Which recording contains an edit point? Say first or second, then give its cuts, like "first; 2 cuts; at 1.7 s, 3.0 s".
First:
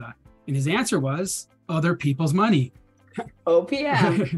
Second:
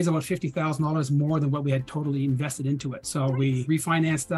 second; 1 cut; at 3.4 s